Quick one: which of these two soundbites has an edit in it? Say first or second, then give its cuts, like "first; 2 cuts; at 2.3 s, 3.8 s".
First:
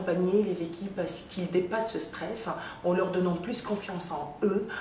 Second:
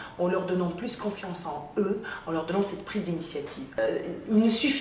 second; 1 cut; at 3.8 s